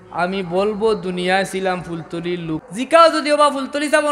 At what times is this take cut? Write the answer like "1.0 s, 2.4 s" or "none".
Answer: 2.7 s